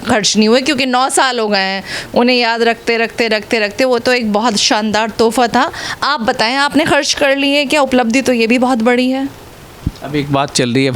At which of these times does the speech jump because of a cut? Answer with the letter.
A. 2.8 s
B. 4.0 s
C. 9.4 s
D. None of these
D